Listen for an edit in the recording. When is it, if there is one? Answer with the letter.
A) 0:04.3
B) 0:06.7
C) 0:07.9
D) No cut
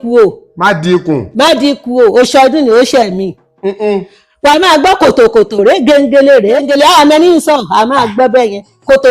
B